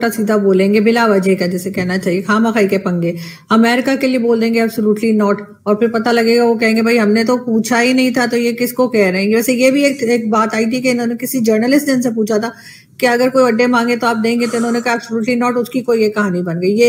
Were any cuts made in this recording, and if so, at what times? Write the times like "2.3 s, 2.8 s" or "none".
none